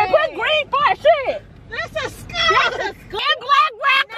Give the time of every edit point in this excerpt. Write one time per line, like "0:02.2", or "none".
none